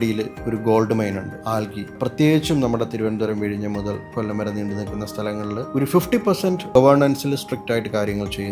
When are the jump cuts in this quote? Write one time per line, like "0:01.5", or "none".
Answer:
0:01.3
0:05.6